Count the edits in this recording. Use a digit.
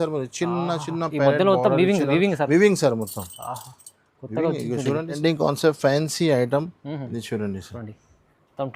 1